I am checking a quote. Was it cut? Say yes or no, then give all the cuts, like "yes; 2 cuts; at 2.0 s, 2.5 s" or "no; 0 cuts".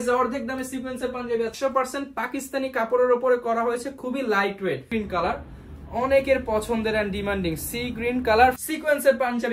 yes; 3 cuts; at 1.5 s, 4.9 s, 8.6 s